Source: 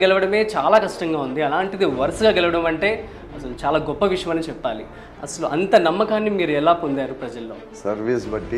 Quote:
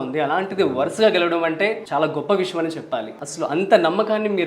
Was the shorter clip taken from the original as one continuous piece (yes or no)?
no